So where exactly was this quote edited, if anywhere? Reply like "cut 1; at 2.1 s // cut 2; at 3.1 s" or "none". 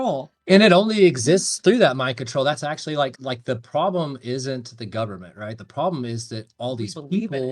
cut 1; at 3.2 s // cut 2; at 5.6 s

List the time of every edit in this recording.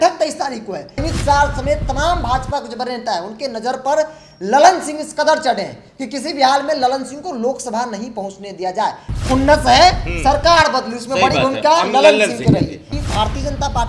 cut 1; at 1.0 s // cut 2; at 12.8 s

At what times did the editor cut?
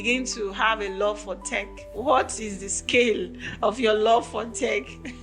cut 1; at 1.8 s

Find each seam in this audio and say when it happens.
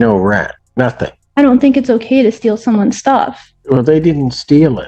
cut 1; at 0.9 s // cut 2; at 3.5 s

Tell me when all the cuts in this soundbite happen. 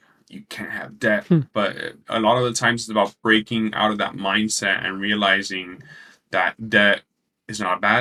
none

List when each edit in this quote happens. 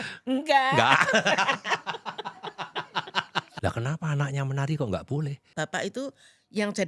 cut 1; at 3.5 s // cut 2; at 5.4 s

